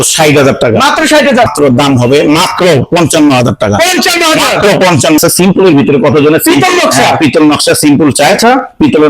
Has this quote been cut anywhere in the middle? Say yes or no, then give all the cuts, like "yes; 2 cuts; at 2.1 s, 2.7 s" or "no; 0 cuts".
yes; 2 cuts; at 1.5 s, 5.2 s